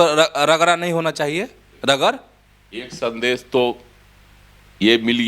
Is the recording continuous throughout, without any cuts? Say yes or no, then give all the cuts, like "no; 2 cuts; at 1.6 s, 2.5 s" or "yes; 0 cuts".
yes; 0 cuts